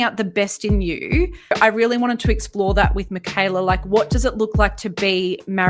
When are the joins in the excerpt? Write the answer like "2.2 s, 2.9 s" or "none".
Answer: 1.5 s

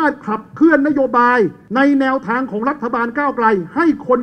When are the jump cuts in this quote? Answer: 1.6 s

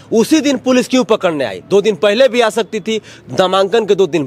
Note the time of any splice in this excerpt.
none

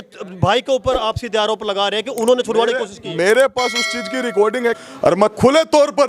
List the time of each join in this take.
4.8 s

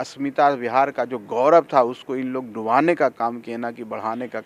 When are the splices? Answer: none

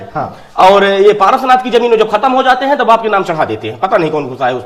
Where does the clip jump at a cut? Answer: none

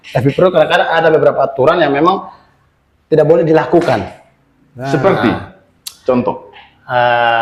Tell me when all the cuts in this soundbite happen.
none

